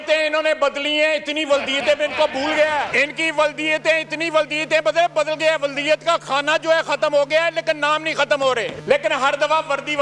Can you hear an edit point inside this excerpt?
yes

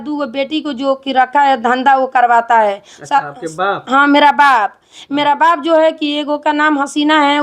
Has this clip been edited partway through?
no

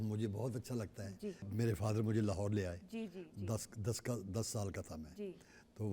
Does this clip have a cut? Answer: yes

